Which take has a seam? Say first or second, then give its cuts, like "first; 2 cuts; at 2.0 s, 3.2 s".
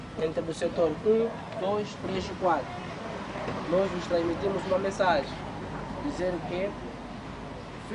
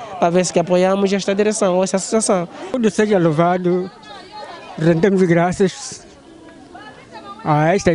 second; 1 cut; at 2.6 s